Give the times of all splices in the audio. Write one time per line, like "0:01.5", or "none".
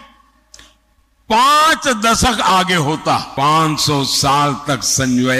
0:03.3